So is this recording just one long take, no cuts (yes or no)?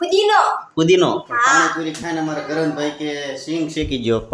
no